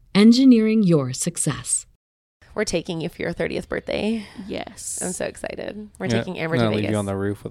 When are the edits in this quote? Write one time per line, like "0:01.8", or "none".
0:02.4